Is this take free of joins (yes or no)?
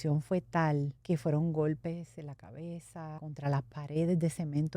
no